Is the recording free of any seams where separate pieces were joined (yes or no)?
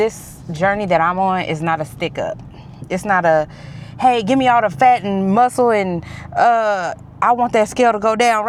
yes